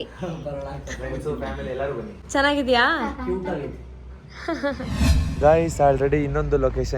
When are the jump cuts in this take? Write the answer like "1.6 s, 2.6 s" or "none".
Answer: 2.2 s, 5.3 s

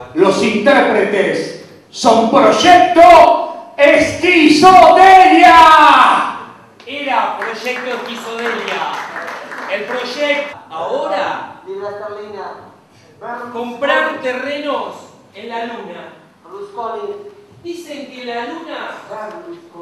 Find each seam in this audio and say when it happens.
none

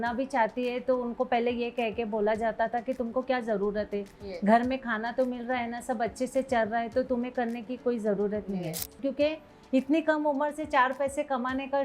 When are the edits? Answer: 9.0 s

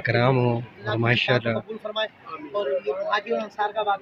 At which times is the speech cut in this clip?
none

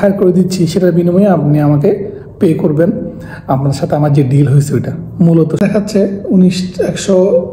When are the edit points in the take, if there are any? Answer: 5.6 s

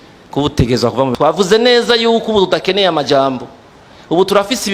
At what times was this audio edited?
1.1 s

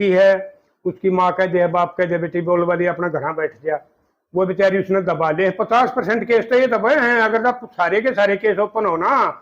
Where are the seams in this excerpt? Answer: none

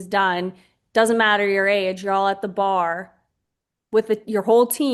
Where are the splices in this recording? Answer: none

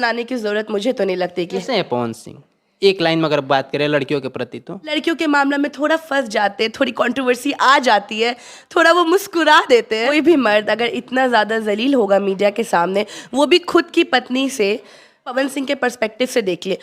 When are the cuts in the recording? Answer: 1.6 s, 5.0 s, 10.1 s, 15.3 s

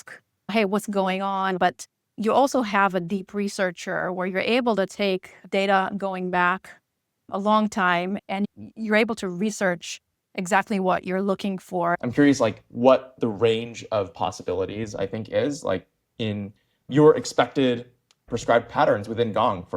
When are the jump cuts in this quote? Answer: 1.6 s, 8.2 s, 12.0 s

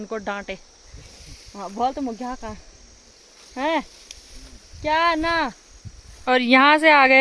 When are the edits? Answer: 6.2 s

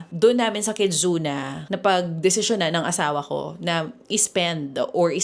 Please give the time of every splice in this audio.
none

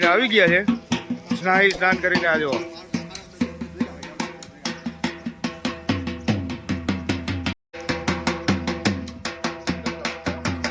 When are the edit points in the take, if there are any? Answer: none

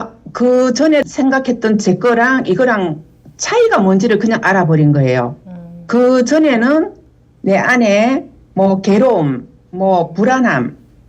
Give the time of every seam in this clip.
1.1 s

